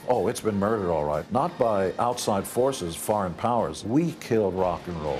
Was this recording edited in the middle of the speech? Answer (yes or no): yes